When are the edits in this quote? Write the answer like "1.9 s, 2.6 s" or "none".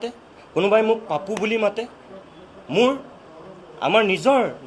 none